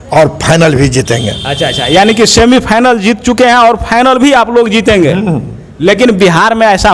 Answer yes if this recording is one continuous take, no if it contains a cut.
yes